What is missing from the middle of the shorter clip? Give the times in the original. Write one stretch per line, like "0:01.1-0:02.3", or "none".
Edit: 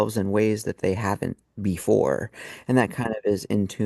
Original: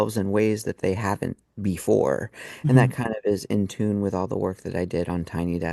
none